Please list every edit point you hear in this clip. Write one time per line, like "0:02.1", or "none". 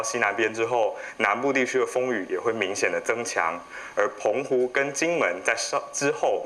none

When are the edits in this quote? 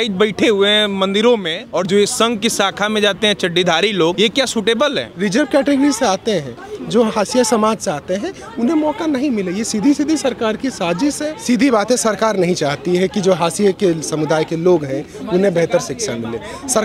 0:01.6
0:04.1
0:05.1
0:11.3

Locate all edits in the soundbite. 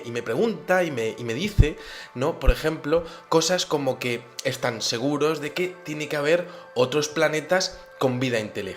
0:01.3

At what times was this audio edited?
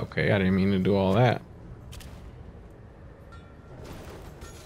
0:03.7

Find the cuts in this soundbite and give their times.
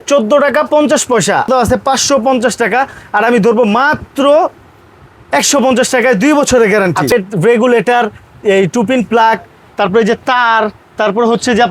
0:01.5
0:07.1

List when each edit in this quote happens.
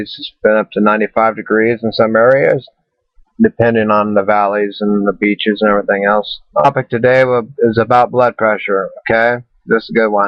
none

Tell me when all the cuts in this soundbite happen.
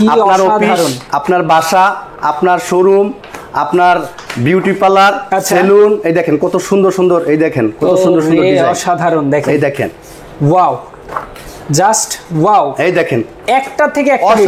none

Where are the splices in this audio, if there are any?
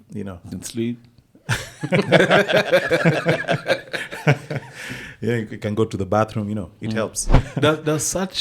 0:07.3

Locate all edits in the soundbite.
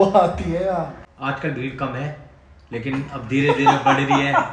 0:01.0

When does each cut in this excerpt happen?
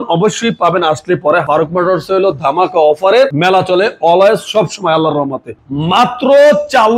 0:01.4
0:03.4
0:05.7

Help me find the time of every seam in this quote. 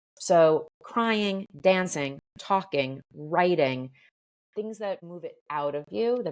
0:05.0

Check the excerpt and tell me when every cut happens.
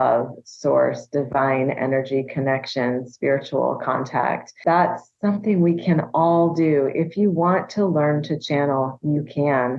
0:04.5

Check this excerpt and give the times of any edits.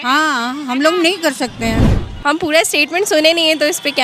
0:01.8

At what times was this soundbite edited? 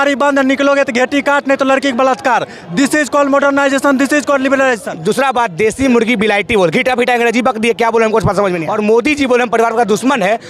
0:04.9
0:08.7

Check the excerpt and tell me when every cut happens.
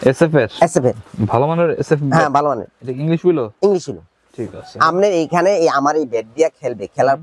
none

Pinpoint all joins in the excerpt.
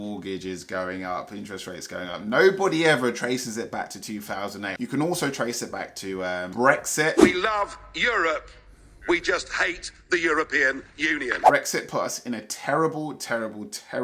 0:04.7
0:11.4

